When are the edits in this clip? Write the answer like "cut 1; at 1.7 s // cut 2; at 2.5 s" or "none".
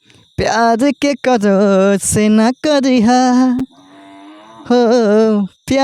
none